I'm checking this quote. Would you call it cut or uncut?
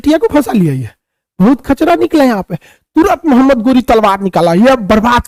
uncut